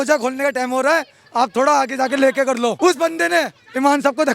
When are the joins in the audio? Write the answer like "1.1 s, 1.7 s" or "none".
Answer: 2.8 s